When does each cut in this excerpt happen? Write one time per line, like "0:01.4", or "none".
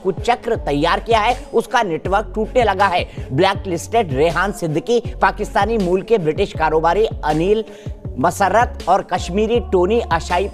none